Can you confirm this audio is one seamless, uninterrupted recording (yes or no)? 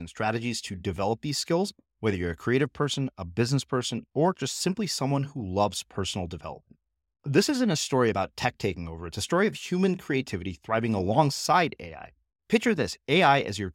yes